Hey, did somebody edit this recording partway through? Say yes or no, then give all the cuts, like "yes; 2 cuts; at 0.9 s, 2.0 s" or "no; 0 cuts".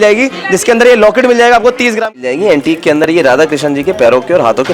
yes; 1 cut; at 2.1 s